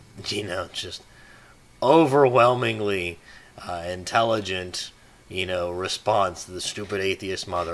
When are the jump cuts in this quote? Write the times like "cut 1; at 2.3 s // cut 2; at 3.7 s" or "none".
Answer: cut 1; at 4.0 s